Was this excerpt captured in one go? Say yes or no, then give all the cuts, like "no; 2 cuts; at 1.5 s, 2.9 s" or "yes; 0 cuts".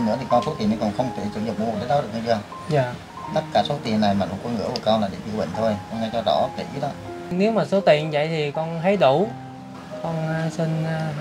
no; 1 cut; at 7.3 s